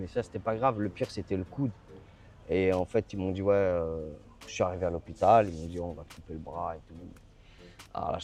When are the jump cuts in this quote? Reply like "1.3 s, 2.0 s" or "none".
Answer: none